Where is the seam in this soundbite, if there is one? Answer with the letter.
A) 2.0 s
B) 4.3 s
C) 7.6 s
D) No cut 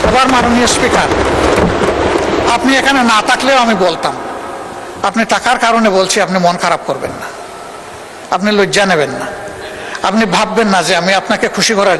D